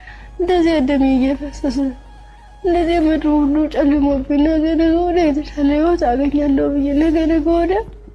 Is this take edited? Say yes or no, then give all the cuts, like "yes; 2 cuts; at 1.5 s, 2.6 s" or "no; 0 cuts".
no; 0 cuts